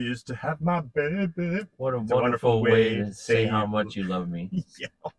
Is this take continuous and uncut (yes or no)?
no